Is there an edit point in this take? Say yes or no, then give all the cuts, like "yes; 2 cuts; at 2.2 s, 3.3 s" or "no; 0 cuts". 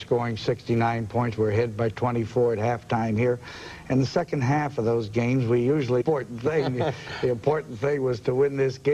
no; 0 cuts